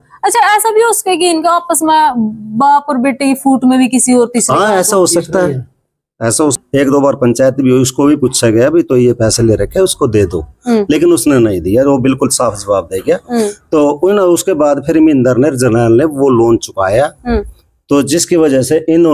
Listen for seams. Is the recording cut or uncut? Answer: cut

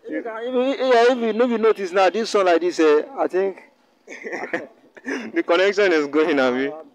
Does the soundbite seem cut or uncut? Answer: uncut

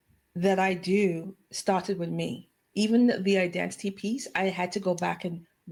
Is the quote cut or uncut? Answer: uncut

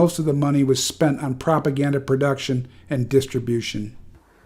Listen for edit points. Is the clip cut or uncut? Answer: cut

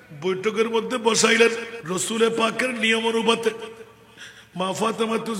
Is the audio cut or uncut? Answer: cut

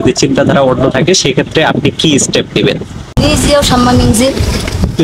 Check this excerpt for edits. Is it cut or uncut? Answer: cut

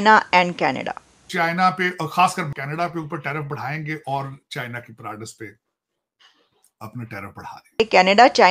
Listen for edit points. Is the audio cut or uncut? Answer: cut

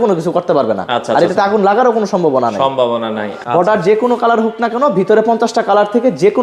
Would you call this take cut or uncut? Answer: cut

